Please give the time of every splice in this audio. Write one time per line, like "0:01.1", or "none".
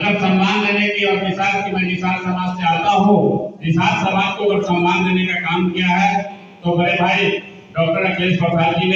none